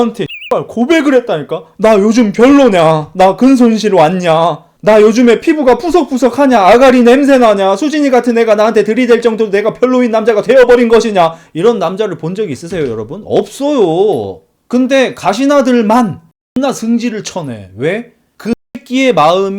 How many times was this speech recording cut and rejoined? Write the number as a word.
one